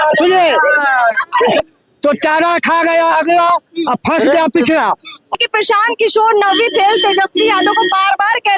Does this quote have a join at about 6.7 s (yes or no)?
no